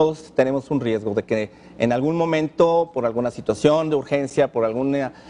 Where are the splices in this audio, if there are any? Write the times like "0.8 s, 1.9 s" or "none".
4.3 s